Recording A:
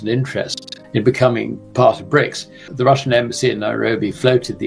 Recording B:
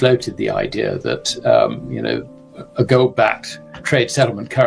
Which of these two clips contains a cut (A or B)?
A